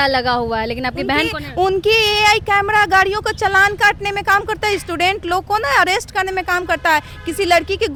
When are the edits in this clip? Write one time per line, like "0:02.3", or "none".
none